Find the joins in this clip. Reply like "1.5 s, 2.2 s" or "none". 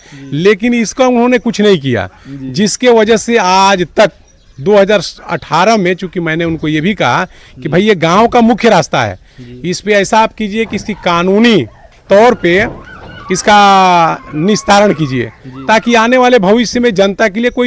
none